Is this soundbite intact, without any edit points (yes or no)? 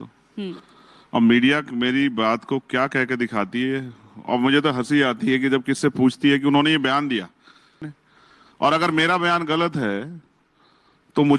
no